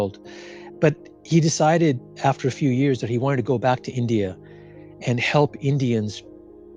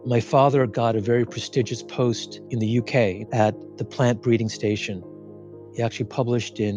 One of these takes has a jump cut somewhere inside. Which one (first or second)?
second